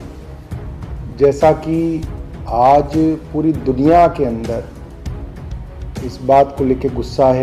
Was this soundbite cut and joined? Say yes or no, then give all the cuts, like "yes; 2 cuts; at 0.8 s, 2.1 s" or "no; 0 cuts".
no; 0 cuts